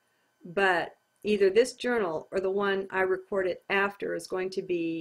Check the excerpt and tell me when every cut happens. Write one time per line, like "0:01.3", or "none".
0:02.8